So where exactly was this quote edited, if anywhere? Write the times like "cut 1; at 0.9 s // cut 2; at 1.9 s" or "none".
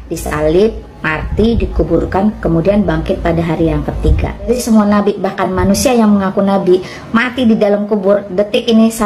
cut 1; at 4.5 s